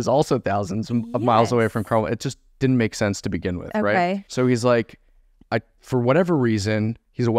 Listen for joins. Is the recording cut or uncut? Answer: cut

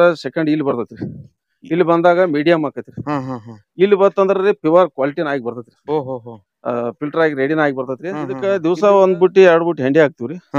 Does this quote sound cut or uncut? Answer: cut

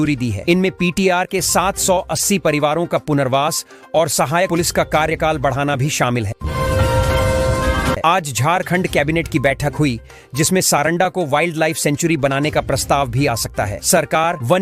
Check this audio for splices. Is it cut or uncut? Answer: uncut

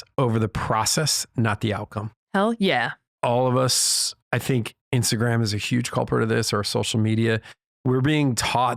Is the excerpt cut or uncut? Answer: cut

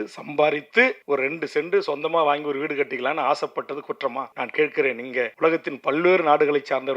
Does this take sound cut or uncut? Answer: cut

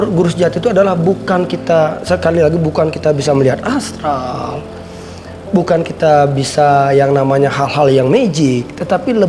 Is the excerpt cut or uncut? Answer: uncut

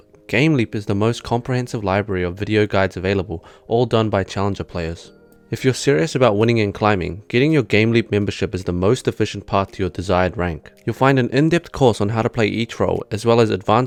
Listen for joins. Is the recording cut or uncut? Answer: uncut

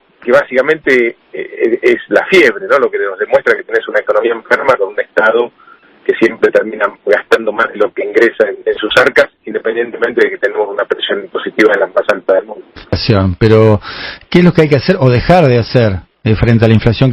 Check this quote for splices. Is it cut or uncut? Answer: uncut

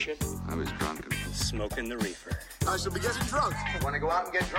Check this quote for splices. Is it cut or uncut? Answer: uncut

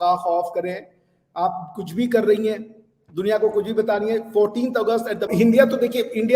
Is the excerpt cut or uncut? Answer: cut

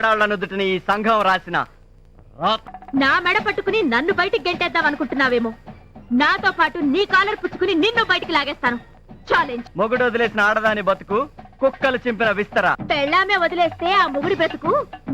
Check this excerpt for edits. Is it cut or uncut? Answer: cut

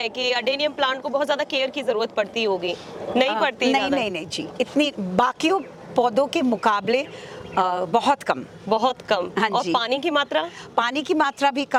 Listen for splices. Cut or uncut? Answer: uncut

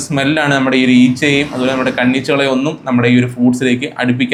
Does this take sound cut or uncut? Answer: uncut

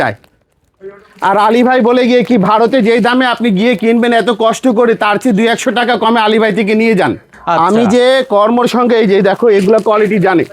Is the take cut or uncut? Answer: uncut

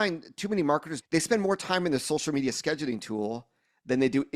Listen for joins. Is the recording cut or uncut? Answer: cut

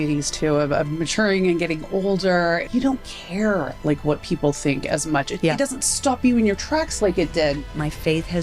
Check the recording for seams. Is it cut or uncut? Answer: cut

